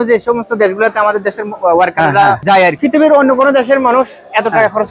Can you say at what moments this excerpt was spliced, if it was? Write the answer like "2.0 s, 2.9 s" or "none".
2.5 s